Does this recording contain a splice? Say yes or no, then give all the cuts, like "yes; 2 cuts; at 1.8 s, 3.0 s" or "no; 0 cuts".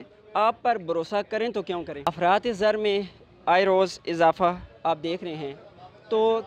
yes; 1 cut; at 2.2 s